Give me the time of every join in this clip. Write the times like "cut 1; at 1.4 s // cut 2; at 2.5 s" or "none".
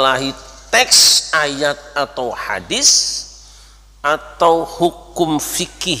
none